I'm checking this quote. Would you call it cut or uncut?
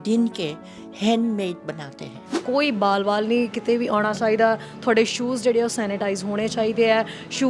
cut